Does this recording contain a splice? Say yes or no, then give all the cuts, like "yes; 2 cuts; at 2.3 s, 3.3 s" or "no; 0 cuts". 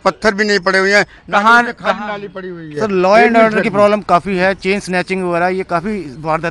no; 0 cuts